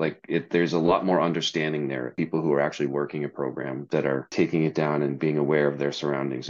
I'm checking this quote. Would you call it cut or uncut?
cut